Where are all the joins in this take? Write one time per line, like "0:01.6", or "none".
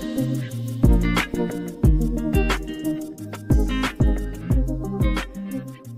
none